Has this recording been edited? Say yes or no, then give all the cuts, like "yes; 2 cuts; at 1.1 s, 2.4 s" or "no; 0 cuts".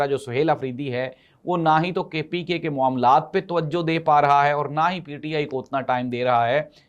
no; 0 cuts